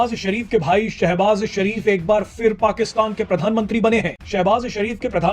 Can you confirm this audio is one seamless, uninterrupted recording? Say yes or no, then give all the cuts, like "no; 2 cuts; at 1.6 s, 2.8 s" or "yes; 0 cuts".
no; 1 cut; at 4.2 s